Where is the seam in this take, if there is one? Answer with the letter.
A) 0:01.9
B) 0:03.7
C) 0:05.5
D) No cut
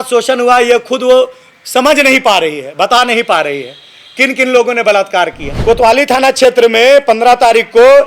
C